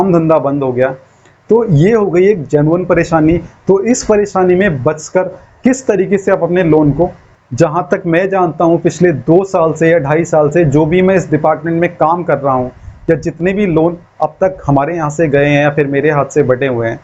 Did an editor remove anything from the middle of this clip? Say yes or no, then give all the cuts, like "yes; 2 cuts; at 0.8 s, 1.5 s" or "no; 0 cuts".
yes; 1 cut; at 7.3 s